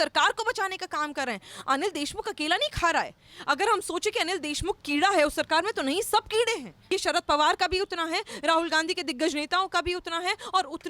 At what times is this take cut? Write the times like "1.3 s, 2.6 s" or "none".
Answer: 6.7 s